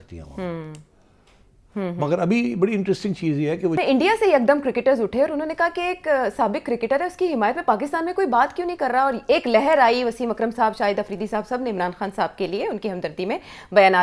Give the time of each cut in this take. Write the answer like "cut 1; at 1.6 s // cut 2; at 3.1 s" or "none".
cut 1; at 3.7 s